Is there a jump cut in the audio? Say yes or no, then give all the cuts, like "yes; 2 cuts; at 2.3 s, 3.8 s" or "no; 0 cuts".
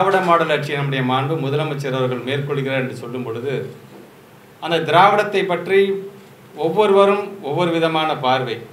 no; 0 cuts